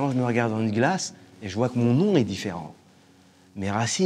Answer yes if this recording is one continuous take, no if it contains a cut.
yes